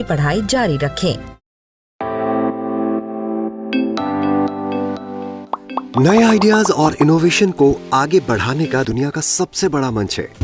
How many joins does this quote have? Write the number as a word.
one